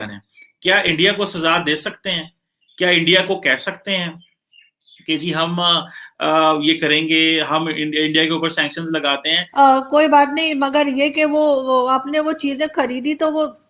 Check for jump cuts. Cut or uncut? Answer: cut